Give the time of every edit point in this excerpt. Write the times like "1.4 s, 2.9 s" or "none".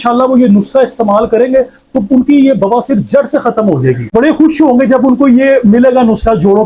4.1 s